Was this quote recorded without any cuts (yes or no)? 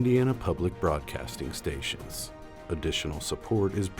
no